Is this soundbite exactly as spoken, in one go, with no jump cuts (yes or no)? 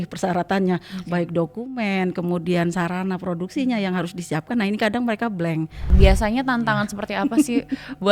no